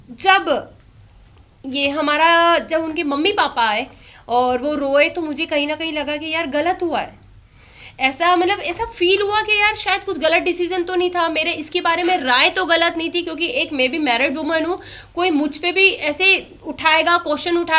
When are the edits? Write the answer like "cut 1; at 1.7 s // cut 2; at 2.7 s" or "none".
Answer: none